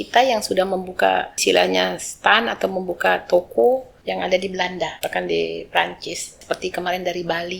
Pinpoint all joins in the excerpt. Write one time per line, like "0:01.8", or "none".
0:01.3
0:03.9
0:05.0
0:06.4